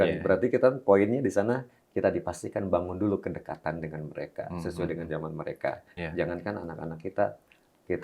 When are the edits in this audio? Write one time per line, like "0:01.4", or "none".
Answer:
0:05.9